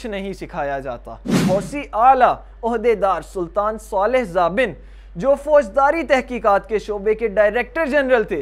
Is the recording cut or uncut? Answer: cut